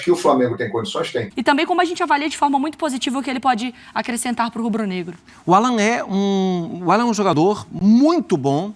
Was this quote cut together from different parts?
yes; 1 cut; at 1.3 s

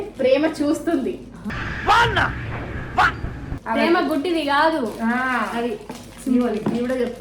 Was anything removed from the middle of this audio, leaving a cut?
yes; 1 cut; at 3.5 s

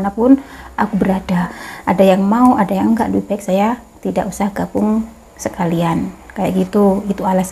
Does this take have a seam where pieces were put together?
yes; 1 cut; at 1.7 s

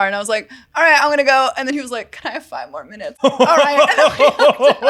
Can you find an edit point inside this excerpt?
yes; 1 cut; at 3.1 s

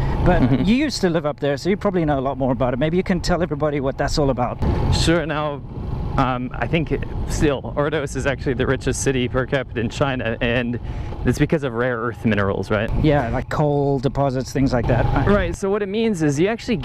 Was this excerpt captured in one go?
yes; 0 cuts

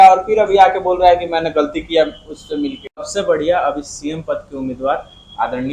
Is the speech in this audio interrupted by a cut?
yes; 1 cut; at 3.1 s

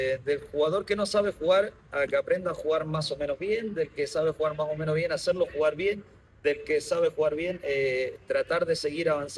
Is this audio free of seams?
yes; 0 cuts

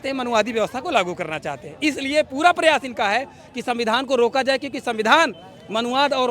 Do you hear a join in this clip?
no; 0 cuts

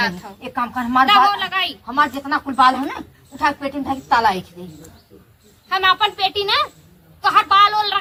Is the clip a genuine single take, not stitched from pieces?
yes; 0 cuts

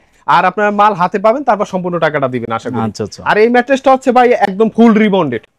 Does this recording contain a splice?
no; 0 cuts

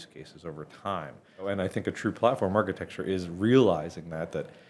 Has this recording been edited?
yes; 1 cut; at 1.5 s

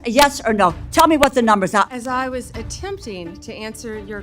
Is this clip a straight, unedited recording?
no; 1 cut; at 1.9 s

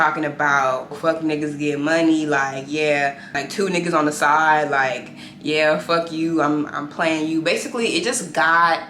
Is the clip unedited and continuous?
no; 2 cuts; at 1.0 s, 3.4 s

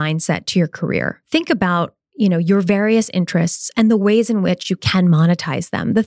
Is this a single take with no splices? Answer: no; 1 cut; at 1.2 s

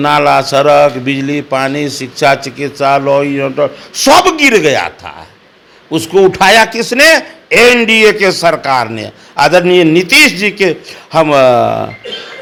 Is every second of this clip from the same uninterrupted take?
yes; 0 cuts

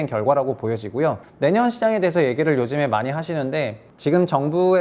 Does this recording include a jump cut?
yes; 2 cuts; at 1.3 s, 3.8 s

